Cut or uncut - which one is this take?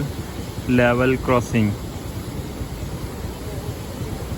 uncut